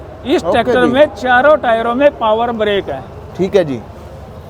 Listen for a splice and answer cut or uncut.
uncut